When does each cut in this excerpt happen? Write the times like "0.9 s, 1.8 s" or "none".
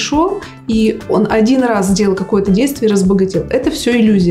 none